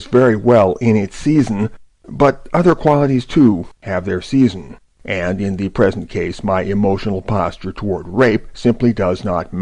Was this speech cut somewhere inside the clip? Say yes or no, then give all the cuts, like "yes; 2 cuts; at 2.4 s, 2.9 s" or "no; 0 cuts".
yes; 1 cut; at 1.1 s